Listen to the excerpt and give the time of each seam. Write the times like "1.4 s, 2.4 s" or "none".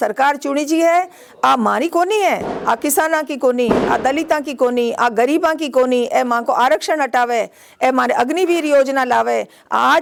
none